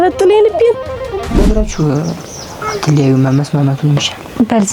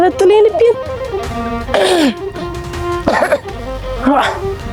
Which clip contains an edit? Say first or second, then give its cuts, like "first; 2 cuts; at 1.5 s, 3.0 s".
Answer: first; 1 cut; at 1.4 s